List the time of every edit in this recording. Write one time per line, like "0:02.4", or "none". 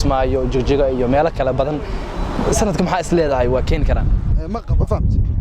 0:04.5

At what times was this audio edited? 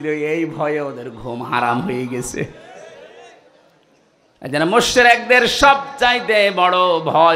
none

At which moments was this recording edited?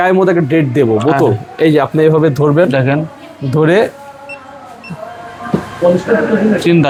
none

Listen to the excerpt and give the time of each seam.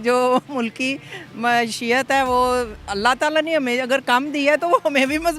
none

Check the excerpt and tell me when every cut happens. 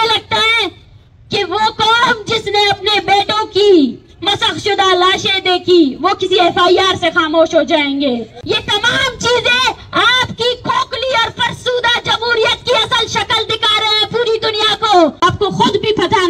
0:08.4
0:15.2

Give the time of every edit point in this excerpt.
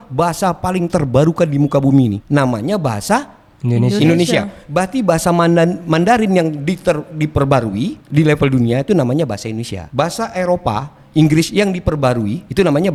none

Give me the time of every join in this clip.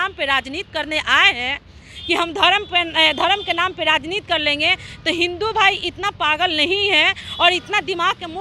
none

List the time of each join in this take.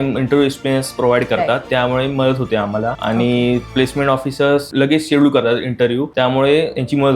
0:01.6
0:03.0
0:03.7
0:04.7
0:06.1

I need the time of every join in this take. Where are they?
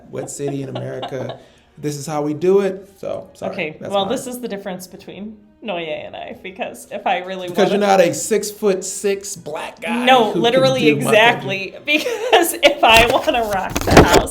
0:02.9

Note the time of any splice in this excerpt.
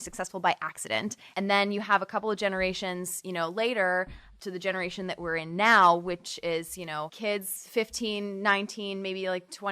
0:01.3
0:04.3
0:07.1

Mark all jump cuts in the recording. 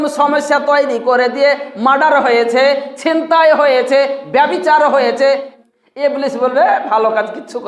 0:05.5

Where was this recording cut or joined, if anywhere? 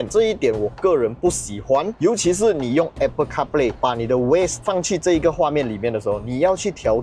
0:01.9

